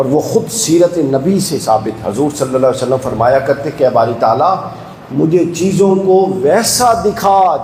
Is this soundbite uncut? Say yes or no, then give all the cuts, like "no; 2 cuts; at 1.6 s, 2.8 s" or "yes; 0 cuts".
yes; 0 cuts